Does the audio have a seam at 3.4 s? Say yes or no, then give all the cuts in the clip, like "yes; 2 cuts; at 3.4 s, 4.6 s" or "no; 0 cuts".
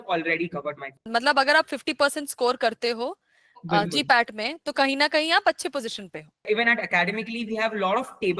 no; 2 cuts; at 0.9 s, 6.5 s